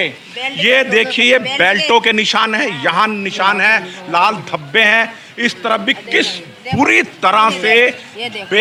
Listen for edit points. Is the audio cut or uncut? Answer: uncut